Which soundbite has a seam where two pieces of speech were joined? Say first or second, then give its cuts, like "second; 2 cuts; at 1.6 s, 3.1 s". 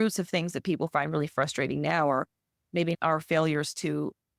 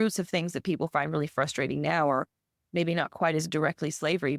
first; 1 cut; at 3.0 s